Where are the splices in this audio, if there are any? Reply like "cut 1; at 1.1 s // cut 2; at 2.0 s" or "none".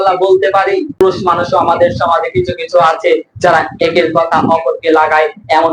cut 1; at 1.3 s